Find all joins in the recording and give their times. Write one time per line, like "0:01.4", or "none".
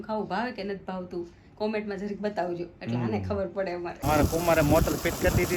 0:04.0